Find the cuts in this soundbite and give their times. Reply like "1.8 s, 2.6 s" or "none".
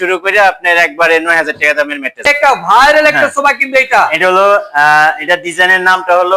2.3 s